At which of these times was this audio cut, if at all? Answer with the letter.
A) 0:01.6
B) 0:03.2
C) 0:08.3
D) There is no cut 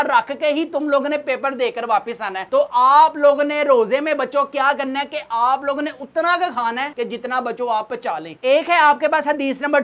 C